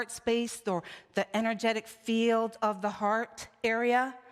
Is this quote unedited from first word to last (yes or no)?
yes